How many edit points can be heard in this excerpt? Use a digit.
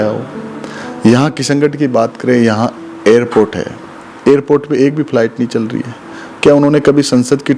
0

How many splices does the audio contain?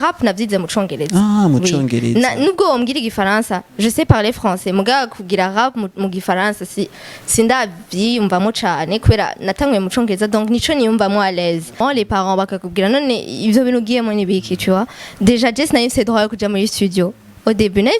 1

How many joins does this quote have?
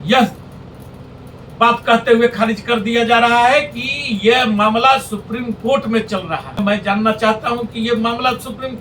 1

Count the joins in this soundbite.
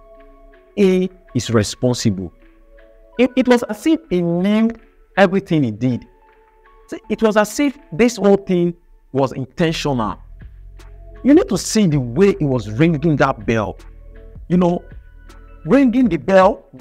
1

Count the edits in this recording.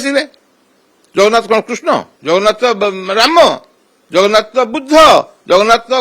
1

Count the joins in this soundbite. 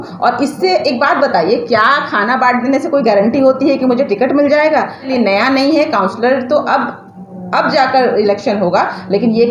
1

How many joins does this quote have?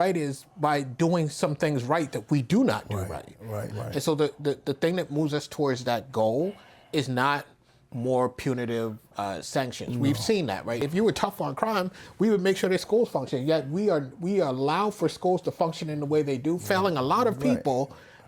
2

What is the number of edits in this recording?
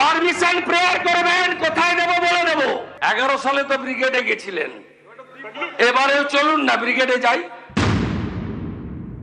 2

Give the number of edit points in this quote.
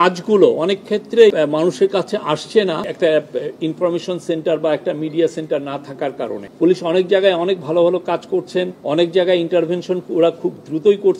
4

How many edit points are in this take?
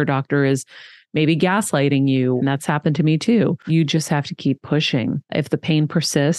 3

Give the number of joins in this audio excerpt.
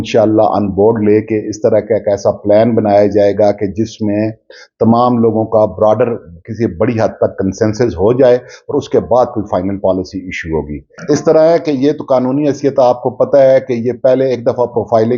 0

